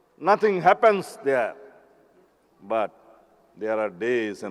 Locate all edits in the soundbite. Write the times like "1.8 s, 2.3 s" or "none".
none